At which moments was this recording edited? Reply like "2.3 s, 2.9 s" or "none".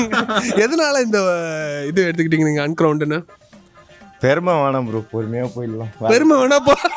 none